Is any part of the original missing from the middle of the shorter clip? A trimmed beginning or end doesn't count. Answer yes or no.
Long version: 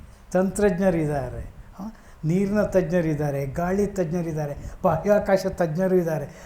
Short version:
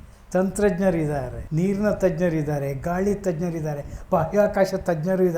yes